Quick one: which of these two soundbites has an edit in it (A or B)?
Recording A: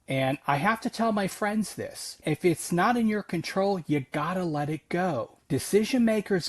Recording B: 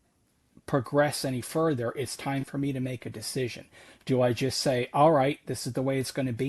A